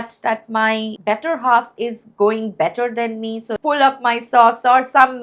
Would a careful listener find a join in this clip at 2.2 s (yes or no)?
no